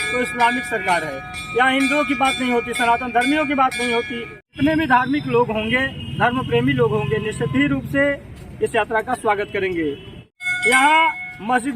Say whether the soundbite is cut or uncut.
cut